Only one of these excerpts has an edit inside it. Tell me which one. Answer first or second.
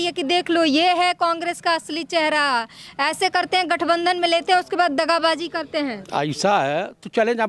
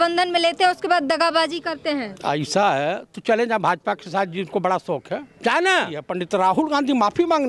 second